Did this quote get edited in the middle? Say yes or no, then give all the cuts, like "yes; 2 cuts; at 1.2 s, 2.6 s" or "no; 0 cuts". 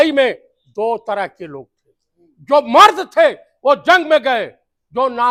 no; 0 cuts